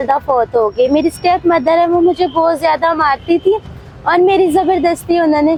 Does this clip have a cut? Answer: no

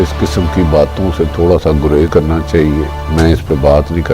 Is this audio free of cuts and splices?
no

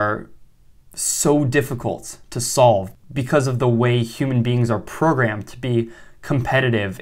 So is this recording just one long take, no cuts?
no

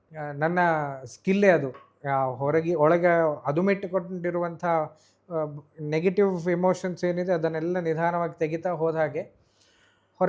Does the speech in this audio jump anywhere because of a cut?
no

